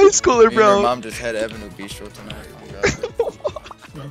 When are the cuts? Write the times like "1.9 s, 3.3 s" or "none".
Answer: none